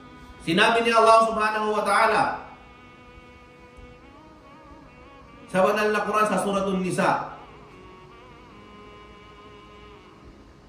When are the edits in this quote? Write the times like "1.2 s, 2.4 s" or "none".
none